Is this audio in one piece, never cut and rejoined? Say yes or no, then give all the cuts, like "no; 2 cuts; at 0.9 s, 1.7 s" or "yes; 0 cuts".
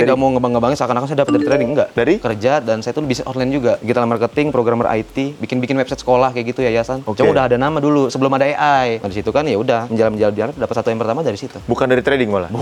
yes; 0 cuts